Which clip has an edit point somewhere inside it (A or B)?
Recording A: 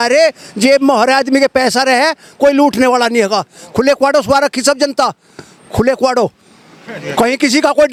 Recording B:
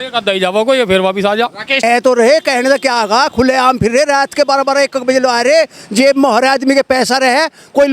B